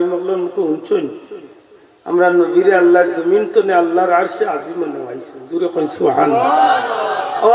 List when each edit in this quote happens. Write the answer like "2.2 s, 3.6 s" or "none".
none